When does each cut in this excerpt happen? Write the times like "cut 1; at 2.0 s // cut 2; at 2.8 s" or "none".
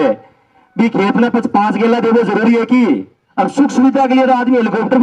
cut 1; at 3.2 s